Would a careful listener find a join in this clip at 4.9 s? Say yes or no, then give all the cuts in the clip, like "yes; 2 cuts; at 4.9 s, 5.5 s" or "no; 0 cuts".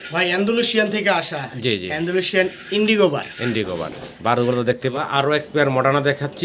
yes; 1 cut; at 4.9 s